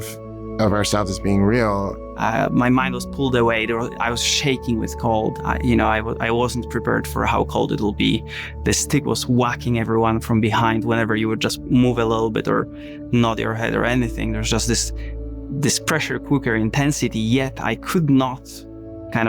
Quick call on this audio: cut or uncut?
cut